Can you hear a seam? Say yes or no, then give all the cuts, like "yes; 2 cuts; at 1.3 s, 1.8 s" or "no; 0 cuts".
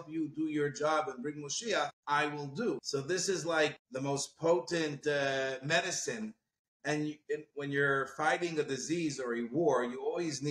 yes; 3 cuts; at 2.0 s, 2.8 s, 3.8 s